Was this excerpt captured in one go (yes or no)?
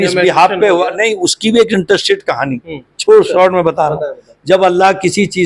yes